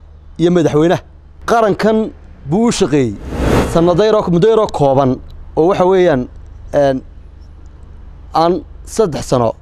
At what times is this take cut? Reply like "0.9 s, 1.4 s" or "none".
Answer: 1.3 s, 3.5 s